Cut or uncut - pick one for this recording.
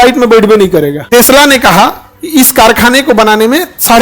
cut